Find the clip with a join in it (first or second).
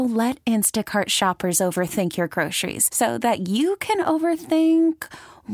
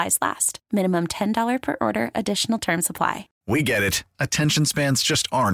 second